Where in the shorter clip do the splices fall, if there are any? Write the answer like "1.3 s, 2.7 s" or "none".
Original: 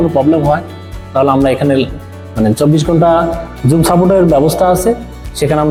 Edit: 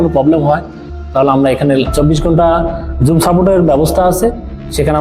1.9 s